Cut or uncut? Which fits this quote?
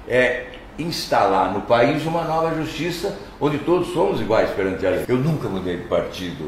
cut